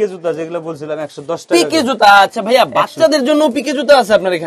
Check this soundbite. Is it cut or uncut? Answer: uncut